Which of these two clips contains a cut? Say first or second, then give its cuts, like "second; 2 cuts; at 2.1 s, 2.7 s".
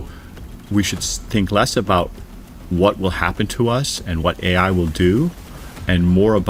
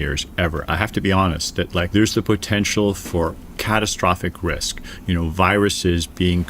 second; 1 cut; at 1.9 s